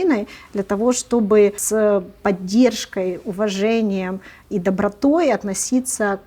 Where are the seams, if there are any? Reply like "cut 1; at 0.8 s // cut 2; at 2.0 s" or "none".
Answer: cut 1; at 1.6 s